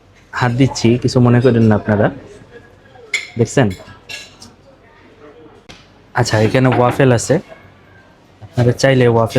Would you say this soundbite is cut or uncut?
cut